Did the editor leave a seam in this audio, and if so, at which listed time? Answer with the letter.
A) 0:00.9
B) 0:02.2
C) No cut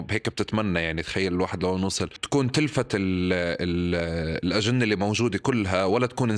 B